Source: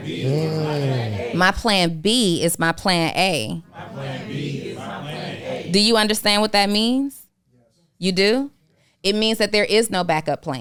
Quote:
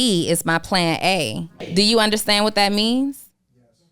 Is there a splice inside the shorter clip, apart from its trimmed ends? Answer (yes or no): yes